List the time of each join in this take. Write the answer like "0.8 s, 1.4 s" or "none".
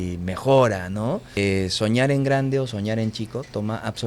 1.3 s